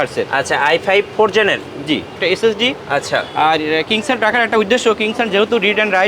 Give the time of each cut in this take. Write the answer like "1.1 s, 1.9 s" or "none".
2.2 s